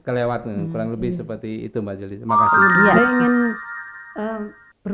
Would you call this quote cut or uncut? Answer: cut